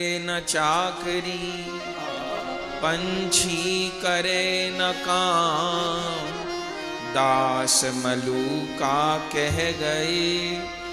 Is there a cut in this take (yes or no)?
no